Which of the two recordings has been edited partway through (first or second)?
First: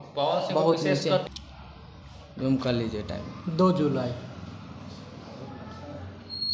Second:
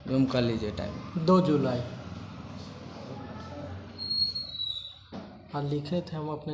first